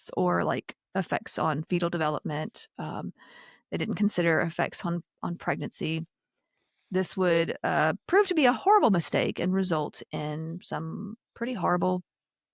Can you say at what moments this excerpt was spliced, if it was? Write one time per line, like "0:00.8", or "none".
none